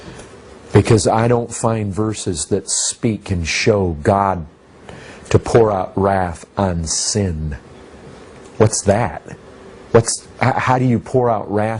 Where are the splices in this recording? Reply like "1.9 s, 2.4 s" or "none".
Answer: 6.2 s